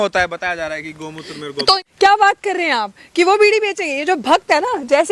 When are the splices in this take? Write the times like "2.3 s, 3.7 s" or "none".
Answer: 1.8 s